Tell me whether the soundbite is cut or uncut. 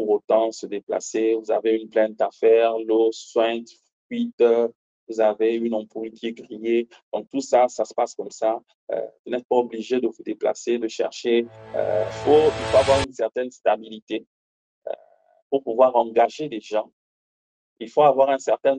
cut